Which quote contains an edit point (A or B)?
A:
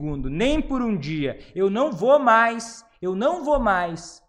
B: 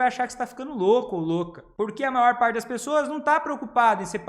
B